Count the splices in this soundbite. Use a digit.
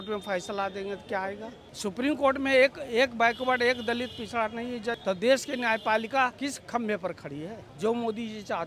4